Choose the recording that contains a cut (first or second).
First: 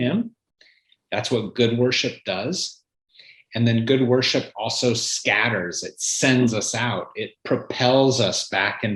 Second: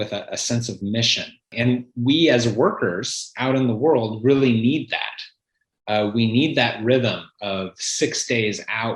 second